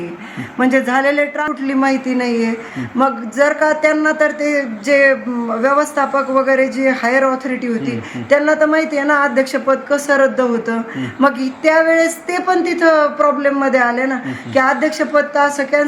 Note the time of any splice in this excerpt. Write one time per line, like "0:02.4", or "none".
0:01.4